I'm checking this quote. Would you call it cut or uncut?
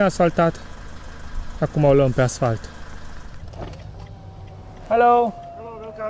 cut